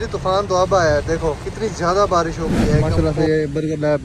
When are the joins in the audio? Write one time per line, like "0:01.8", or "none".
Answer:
0:01.5
0:02.9

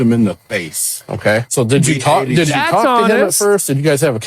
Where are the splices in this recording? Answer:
none

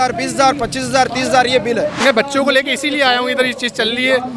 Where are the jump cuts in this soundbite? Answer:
0:02.0

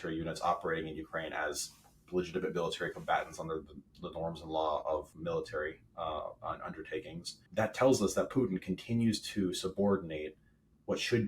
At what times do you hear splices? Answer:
0:05.1
0:07.4

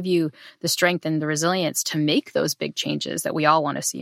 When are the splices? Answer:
none

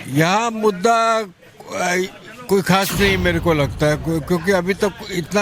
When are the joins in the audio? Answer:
none

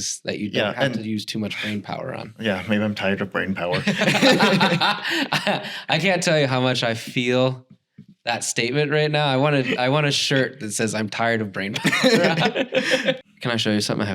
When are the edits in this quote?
0:13.2

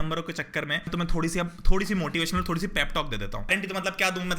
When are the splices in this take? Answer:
0:00.9
0:03.5

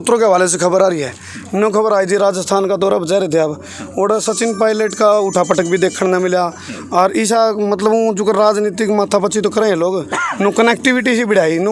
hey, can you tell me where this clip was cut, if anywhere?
none

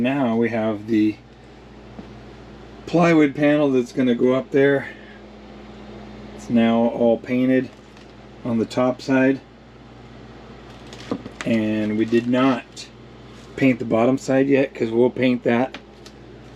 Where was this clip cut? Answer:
none

